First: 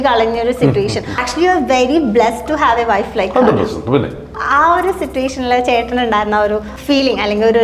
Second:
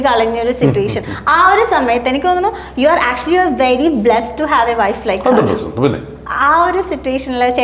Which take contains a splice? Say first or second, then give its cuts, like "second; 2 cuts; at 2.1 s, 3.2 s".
first; 2 cuts; at 1.2 s, 6.7 s